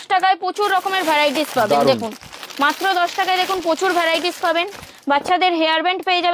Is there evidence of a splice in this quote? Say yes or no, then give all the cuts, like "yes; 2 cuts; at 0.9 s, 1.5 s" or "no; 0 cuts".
no; 0 cuts